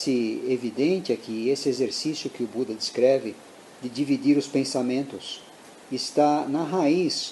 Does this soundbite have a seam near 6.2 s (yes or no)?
yes